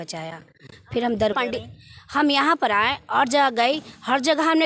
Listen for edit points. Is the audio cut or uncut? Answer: cut